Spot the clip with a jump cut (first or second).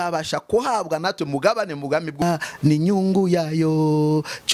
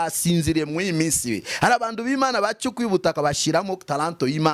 first